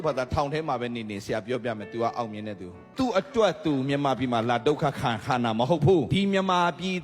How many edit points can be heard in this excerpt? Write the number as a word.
two